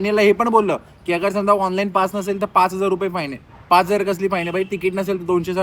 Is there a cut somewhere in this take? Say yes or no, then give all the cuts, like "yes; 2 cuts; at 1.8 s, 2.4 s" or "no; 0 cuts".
no; 0 cuts